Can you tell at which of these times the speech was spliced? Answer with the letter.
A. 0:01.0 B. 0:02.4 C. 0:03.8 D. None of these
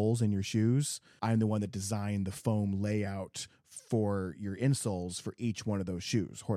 A